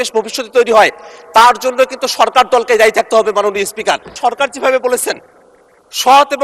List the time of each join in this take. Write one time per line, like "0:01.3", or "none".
0:04.1